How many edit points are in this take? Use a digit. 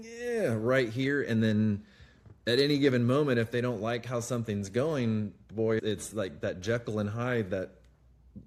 0